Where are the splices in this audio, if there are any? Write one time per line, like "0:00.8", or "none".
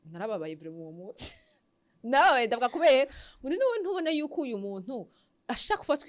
none